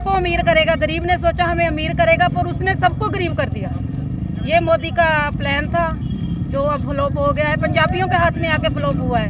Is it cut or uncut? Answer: uncut